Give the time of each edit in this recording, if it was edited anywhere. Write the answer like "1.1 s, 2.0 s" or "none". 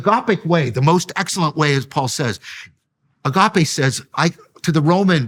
none